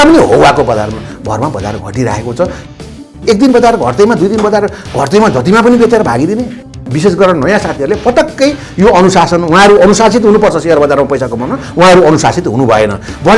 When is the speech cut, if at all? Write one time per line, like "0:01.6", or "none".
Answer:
0:02.9
0:06.7